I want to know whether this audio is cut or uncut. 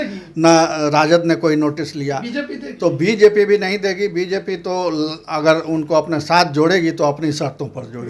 uncut